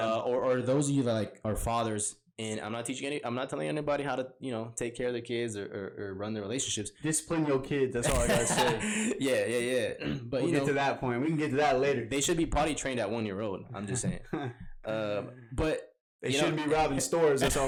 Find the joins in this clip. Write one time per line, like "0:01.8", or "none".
none

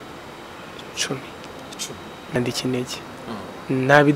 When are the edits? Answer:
0:02.4

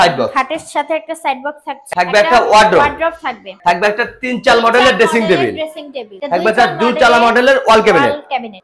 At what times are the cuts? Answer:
0:01.9
0:03.5
0:06.1

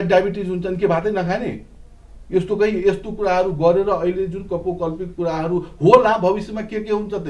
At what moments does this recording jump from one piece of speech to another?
none

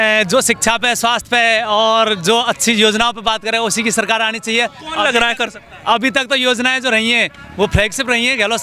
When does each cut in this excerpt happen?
none

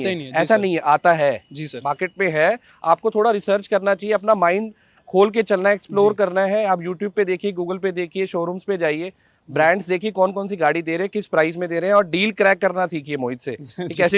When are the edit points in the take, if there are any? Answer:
none

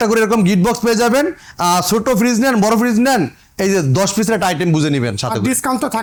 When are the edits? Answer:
none

